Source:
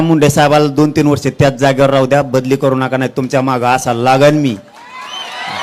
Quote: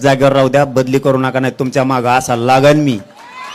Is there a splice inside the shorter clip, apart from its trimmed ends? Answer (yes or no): no